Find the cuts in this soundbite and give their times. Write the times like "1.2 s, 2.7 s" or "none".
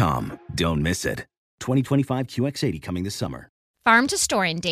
3.7 s